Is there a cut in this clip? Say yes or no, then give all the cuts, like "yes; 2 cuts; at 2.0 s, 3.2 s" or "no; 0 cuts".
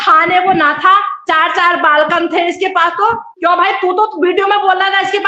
no; 0 cuts